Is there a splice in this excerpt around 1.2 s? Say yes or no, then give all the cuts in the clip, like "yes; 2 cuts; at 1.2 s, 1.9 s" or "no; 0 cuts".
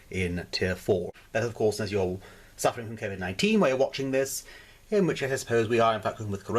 yes; 1 cut; at 1.2 s